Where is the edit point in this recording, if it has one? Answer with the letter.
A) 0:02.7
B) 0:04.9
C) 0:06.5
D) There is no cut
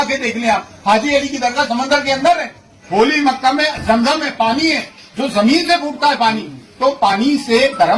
A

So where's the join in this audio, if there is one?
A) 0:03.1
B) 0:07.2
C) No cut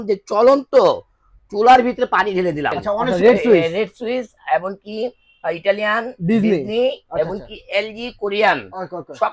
A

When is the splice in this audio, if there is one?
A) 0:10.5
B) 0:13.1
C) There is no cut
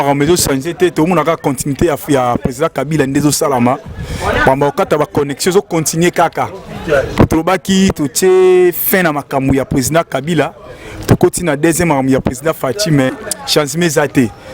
B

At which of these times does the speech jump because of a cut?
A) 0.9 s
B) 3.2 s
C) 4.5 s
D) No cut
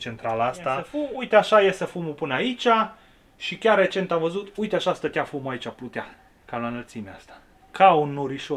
A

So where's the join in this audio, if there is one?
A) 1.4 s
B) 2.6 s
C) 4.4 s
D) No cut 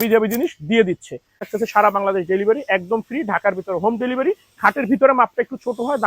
A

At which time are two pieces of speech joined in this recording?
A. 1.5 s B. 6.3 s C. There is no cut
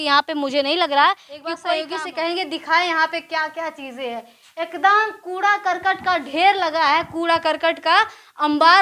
A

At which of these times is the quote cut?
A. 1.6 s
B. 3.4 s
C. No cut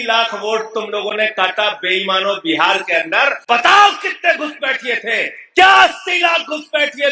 B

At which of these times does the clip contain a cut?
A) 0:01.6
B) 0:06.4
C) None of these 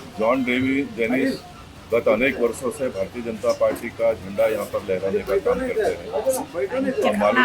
C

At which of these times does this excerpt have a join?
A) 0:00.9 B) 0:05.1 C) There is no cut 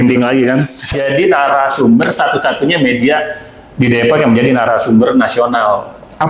A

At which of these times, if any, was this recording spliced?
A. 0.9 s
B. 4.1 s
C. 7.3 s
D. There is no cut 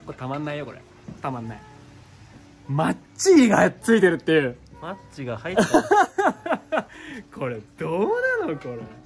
D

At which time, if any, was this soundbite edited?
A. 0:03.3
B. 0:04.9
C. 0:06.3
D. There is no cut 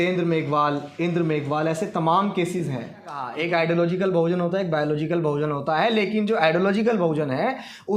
A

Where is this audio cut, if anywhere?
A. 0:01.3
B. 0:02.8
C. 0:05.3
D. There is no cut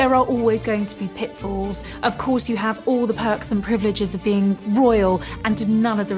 D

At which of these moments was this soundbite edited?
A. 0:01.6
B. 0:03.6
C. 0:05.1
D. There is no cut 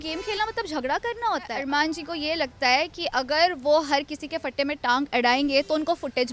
A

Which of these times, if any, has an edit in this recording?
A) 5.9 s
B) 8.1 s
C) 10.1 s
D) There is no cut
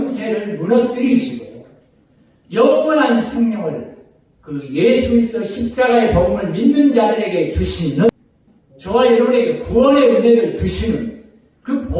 B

